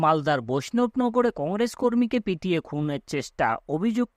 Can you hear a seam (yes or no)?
no